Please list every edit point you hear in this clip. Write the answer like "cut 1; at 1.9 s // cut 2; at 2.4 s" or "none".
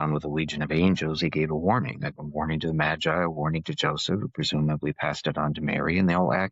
none